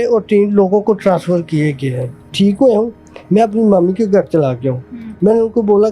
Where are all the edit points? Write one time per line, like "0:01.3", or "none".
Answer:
0:02.2